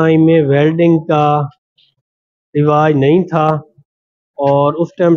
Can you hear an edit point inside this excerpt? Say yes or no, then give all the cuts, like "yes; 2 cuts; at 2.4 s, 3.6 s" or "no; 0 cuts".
no; 0 cuts